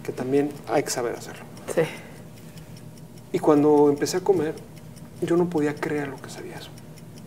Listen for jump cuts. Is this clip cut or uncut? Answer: uncut